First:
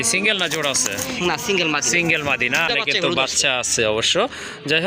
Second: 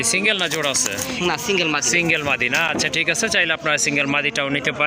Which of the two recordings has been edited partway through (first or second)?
first